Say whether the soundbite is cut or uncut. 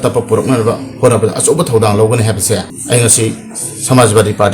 cut